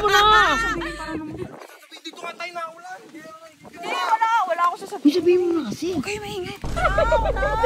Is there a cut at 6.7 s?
yes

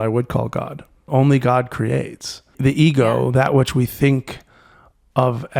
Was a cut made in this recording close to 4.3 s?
no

